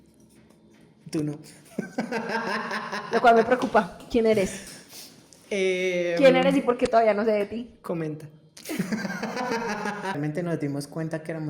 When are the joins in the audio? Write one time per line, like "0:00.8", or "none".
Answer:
0:10.2